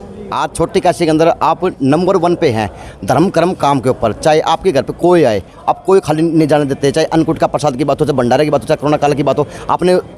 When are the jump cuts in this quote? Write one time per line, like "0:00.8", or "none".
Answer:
none

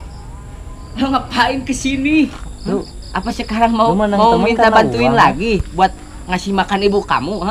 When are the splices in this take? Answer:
0:02.3

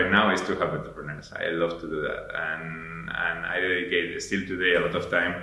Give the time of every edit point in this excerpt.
none

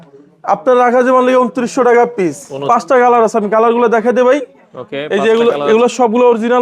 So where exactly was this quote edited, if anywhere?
0:02.5

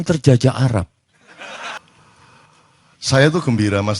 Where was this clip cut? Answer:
0:01.8

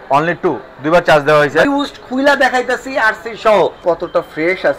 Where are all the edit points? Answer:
0:01.7
0:03.8

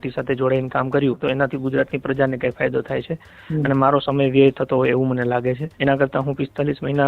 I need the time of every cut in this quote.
0:01.2
0:05.7

